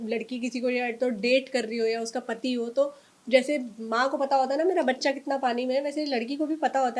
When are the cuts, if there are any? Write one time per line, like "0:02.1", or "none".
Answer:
none